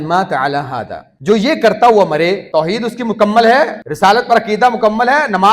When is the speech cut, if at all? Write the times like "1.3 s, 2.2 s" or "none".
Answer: 1.0 s, 2.4 s, 3.8 s